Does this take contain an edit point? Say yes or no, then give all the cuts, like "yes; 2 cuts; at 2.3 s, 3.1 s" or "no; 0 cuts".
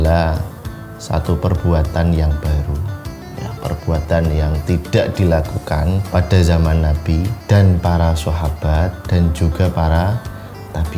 yes; 3 cuts; at 6.1 s, 7.4 s, 9.0 s